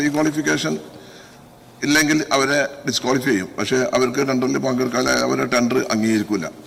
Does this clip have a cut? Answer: no; 0 cuts

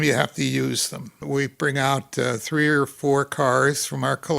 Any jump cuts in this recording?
yes; 1 cut; at 1.2 s

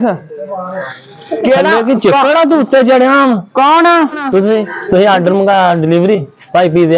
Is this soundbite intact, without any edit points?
no; 1 cut; at 4.7 s

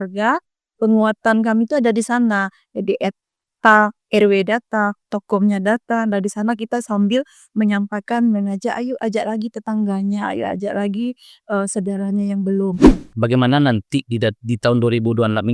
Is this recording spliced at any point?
yes; 1 cut; at 12.9 s

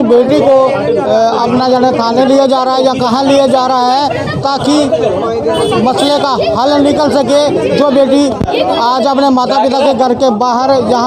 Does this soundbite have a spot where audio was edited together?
no; 0 cuts

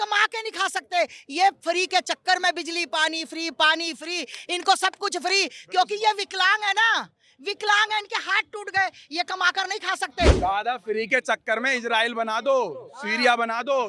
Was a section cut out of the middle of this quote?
yes; 1 cut; at 10.3 s

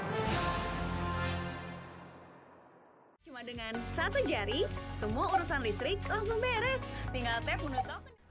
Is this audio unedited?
no; 1 cut; at 3.0 s

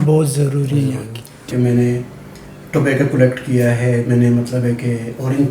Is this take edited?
yes; 1 cut; at 1.5 s

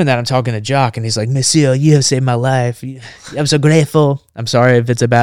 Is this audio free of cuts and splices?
yes; 0 cuts

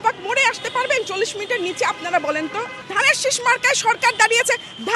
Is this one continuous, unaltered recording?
no; 1 cut; at 2.7 s

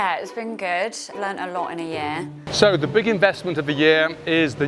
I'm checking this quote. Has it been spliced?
yes; 1 cut; at 2.4 s

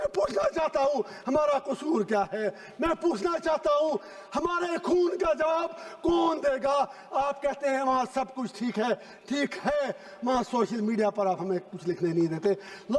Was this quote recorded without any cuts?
yes; 0 cuts

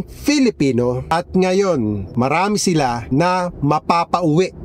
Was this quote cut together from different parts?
yes; 3 cuts; at 1.1 s, 2.1 s, 3.0 s

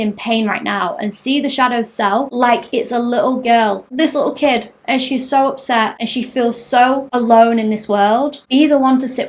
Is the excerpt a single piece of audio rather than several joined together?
no; 5 cuts; at 2.3 s, 3.9 s, 5.9 s, 7.1 s, 8.4 s

